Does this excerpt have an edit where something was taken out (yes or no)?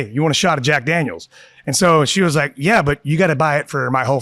no